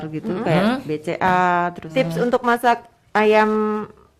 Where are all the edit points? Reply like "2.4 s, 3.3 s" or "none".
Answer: 1.8 s